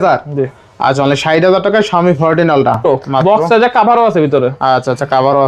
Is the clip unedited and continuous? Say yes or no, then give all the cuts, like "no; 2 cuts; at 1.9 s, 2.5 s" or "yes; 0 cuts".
no; 1 cut; at 2.8 s